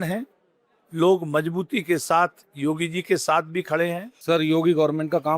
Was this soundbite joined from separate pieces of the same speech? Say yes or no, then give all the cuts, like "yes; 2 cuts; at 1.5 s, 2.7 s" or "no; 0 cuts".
yes; 1 cut; at 4.1 s